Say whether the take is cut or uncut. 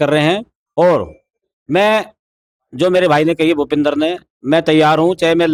uncut